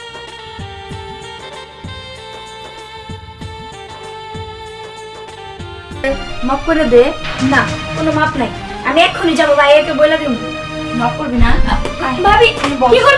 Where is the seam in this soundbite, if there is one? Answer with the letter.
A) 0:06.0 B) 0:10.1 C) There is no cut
A